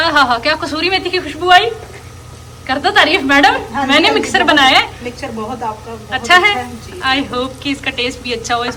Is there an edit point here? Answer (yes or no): no